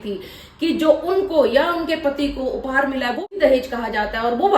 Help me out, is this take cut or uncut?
cut